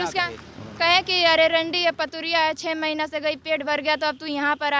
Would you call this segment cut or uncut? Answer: uncut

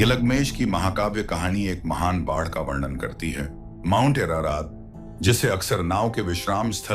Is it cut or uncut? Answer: cut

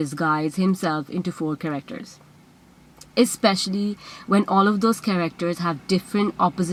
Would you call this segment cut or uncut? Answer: uncut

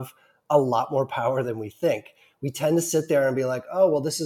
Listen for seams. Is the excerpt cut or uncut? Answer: uncut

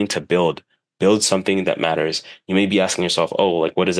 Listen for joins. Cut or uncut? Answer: uncut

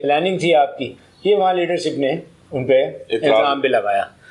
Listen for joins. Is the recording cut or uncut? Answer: uncut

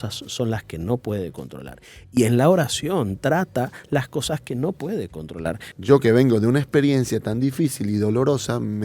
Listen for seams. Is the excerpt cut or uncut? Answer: cut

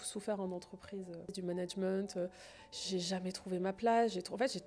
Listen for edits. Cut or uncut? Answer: cut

